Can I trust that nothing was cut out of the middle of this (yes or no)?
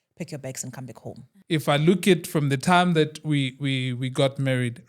no